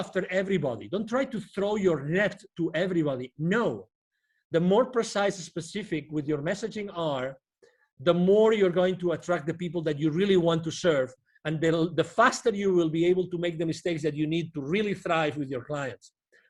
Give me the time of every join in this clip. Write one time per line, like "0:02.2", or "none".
none